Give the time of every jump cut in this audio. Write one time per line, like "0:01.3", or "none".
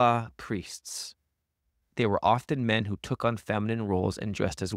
0:01.8